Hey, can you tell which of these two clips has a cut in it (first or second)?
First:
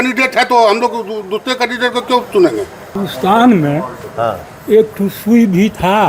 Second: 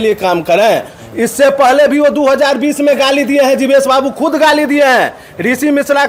first